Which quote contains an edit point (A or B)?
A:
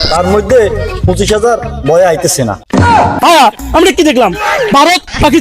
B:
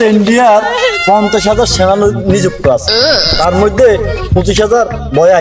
A